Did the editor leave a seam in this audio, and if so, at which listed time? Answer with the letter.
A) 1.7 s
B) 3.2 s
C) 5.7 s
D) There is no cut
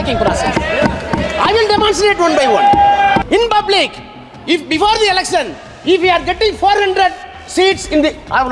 B